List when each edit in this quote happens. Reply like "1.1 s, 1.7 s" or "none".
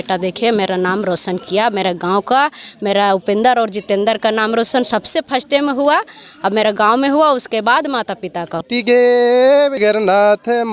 8.7 s, 9.8 s